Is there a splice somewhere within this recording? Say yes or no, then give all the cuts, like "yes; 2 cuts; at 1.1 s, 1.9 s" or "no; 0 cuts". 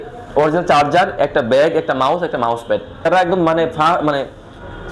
yes; 1 cut; at 3.1 s